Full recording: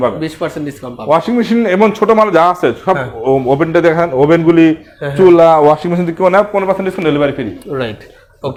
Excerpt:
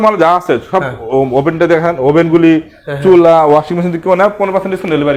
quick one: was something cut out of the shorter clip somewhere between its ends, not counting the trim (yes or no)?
no